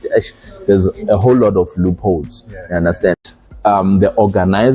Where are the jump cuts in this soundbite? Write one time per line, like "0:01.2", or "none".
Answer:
0:03.2

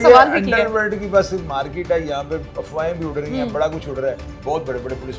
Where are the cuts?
0:04.3

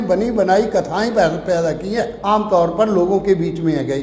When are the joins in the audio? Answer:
0:02.1

